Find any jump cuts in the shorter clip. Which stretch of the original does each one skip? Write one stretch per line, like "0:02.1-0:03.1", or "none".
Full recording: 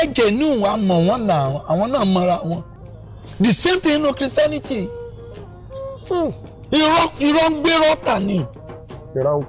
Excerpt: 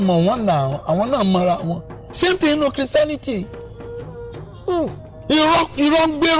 0:03.0-0:03.6